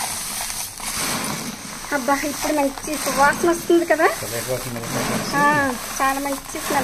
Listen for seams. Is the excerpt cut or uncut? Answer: uncut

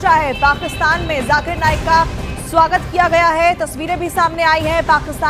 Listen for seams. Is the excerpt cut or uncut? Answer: cut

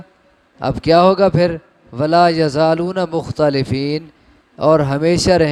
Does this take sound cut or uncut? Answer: uncut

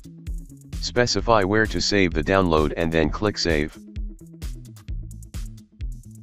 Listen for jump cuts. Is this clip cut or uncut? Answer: cut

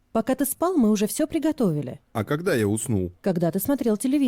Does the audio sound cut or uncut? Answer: cut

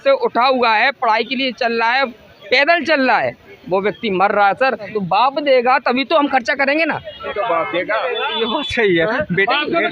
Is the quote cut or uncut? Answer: cut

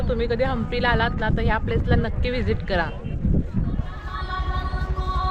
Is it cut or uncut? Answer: cut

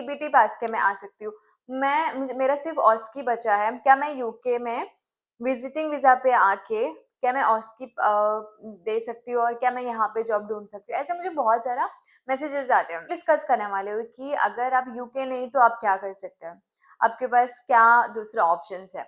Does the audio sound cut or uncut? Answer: cut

